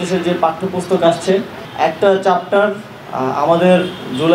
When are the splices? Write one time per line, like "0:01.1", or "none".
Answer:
0:01.6